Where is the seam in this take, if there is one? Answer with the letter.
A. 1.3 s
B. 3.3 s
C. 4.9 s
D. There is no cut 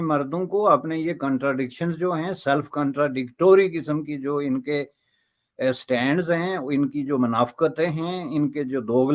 D